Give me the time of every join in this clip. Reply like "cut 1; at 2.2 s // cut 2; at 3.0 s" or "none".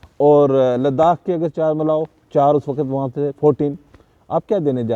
none